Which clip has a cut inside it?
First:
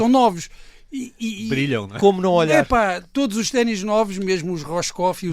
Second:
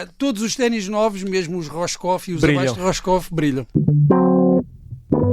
second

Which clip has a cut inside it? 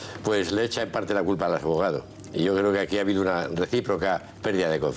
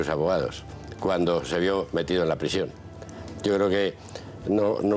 first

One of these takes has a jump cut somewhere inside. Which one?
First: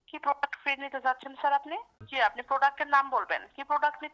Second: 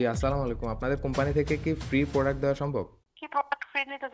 first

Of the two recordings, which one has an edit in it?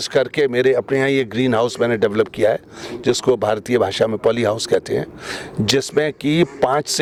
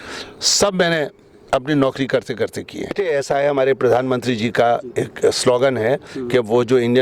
second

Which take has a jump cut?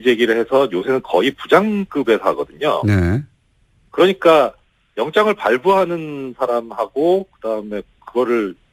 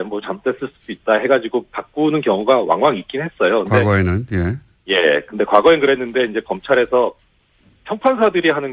second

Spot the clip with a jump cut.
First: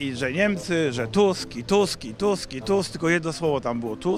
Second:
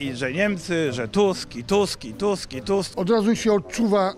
second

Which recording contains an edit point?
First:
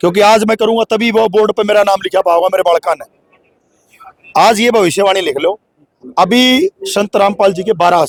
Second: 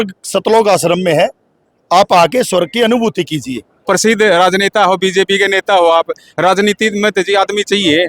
second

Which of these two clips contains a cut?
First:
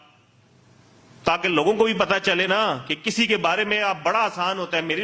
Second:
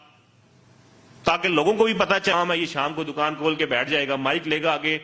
second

